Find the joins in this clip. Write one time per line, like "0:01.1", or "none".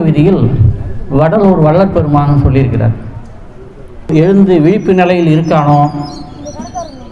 0:04.1